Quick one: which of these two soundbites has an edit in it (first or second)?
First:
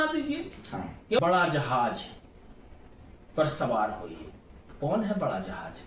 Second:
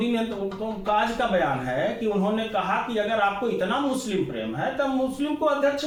first